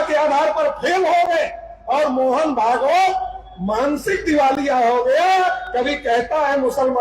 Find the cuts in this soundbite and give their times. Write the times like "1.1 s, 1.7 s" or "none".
none